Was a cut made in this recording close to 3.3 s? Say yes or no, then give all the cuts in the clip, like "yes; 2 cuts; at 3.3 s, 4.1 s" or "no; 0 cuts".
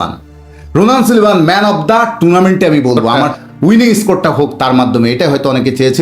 yes; 1 cut; at 3.3 s